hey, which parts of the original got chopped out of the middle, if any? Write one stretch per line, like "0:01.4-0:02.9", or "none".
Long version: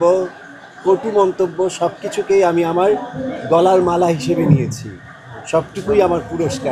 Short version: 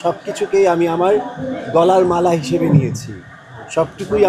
none

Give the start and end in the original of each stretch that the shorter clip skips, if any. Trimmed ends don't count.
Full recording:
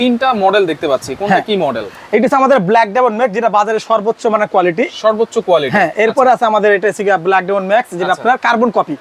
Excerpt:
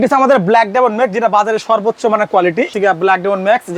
0:04.9-0:07.0

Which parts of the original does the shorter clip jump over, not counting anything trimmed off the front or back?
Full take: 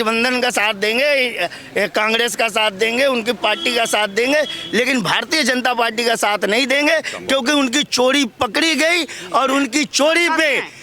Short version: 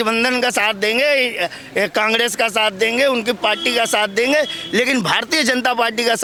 none

